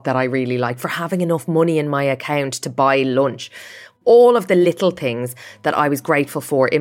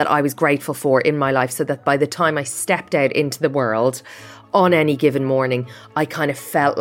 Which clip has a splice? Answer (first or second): first